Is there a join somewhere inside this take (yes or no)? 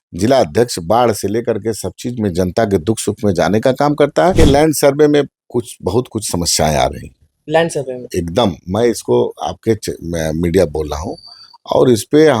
yes